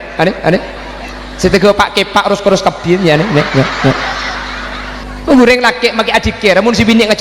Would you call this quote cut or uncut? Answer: cut